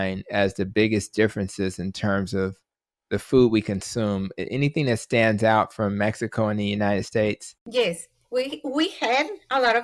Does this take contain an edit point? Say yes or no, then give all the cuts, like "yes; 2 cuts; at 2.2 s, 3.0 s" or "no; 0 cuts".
yes; 1 cut; at 7.5 s